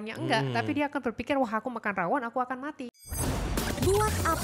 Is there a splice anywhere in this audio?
yes; 1 cut; at 2.9 s

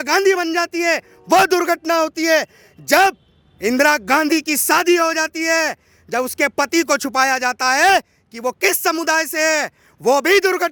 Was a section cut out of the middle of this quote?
no; 0 cuts

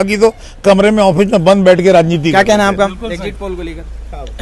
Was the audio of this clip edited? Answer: no; 0 cuts

